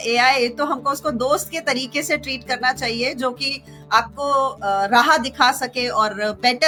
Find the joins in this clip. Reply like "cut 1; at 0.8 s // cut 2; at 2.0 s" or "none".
none